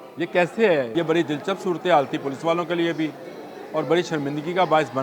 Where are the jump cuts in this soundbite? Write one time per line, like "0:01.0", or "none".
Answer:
0:00.9

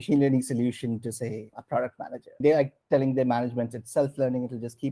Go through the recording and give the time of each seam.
0:01.5

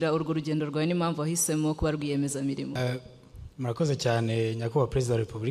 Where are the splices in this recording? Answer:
0:02.8

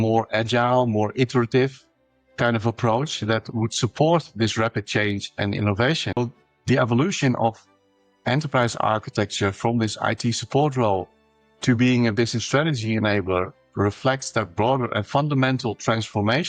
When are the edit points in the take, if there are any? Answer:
0:06.2

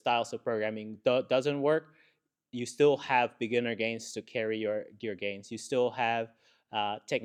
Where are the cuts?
none

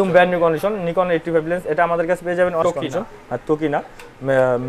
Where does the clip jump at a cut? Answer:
0:02.6

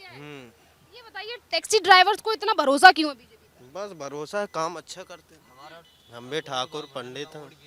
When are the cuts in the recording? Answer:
none

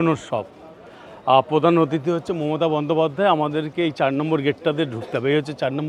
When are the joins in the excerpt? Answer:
none

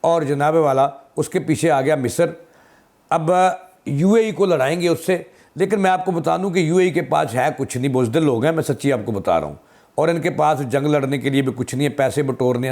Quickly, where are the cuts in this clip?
none

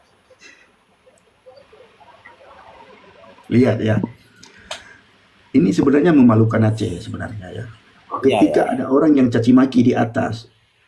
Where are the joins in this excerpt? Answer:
none

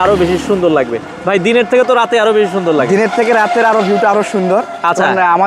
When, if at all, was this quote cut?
none

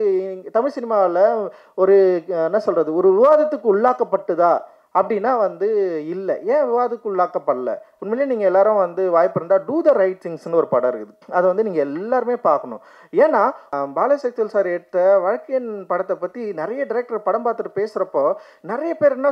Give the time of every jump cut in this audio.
0:07.9
0:13.7

